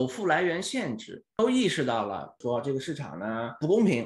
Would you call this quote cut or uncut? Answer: cut